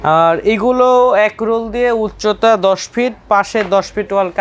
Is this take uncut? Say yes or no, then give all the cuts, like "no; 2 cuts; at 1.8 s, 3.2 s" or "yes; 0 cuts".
yes; 0 cuts